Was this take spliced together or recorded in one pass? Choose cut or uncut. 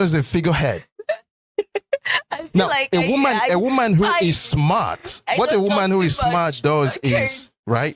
uncut